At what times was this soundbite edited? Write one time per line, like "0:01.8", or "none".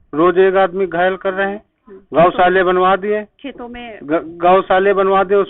none